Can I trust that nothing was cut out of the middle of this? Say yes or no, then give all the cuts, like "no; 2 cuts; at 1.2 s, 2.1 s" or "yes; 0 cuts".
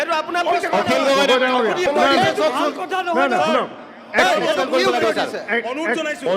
no; 1 cut; at 1.9 s